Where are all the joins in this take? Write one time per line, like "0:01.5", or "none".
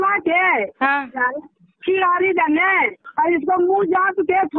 0:03.0